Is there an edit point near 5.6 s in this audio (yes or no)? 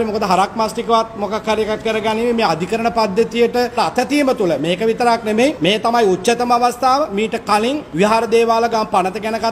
yes